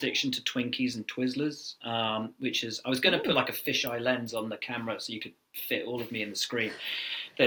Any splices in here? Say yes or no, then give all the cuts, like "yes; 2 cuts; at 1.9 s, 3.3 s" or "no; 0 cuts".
no; 0 cuts